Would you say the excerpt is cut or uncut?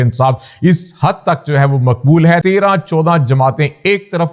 cut